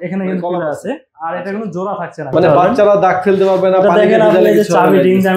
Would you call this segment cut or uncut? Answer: cut